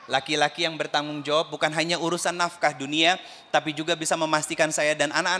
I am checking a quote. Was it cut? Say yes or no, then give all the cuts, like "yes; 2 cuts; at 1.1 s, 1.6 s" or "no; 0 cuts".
no; 0 cuts